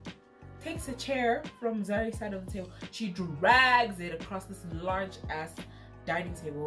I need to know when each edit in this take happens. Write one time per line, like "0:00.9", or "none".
none